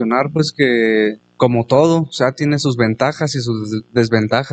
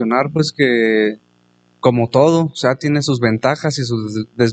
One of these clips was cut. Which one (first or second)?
first